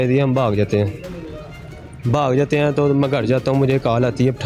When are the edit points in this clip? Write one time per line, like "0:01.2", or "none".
none